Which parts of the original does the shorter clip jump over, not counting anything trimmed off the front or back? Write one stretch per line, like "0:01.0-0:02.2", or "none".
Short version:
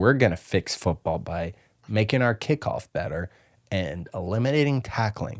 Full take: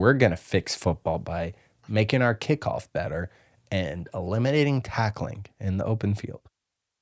none